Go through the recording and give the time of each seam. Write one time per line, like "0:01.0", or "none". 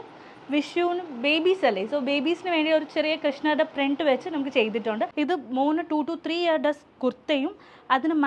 0:05.1